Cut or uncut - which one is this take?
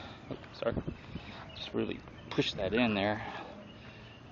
cut